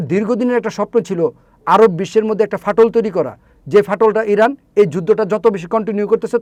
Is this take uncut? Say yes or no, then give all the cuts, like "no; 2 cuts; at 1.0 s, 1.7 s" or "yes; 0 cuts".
yes; 0 cuts